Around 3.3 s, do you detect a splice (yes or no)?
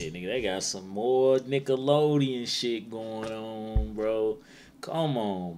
no